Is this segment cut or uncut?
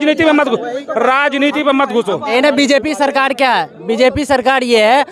cut